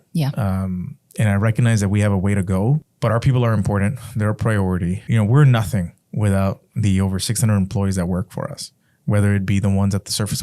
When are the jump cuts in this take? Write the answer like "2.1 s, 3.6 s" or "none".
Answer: 2.9 s, 5.0 s